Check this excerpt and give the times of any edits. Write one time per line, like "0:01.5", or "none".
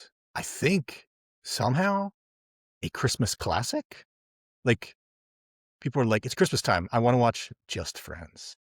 none

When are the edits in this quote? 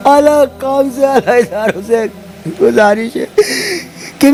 none

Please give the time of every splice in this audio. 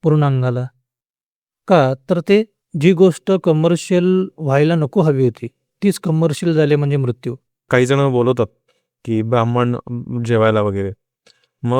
0:02.6
0:07.7

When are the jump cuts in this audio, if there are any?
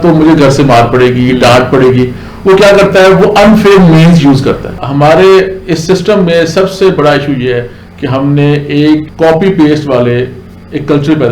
0:04.8
0:09.0

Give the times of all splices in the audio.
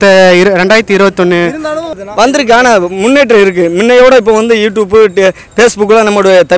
0:02.0

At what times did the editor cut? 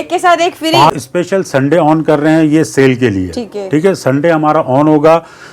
0:00.9

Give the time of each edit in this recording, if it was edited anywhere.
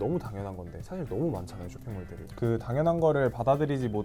none

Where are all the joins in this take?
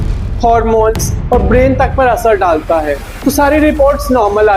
0:03.1

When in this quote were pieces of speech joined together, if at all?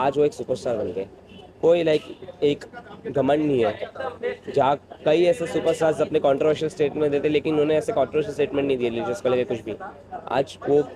none

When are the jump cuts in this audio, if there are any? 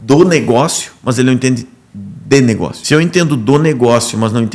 0:02.8

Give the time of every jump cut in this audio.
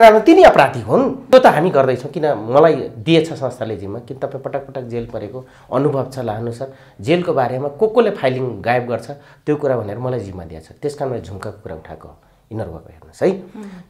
0:01.3

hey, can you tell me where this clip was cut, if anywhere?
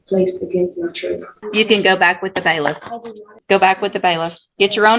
0:01.3
0:03.3

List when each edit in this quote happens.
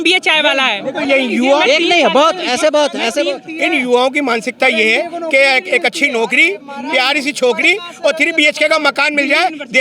none

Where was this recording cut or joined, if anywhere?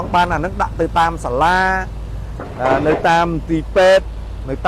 none

